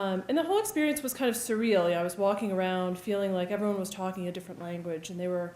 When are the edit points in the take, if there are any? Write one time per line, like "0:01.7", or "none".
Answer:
0:03.5